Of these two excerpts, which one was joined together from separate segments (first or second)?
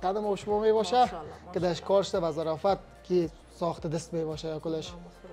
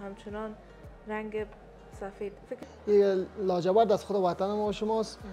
second